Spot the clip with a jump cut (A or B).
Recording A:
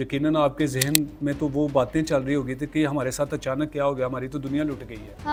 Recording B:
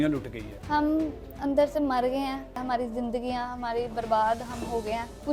B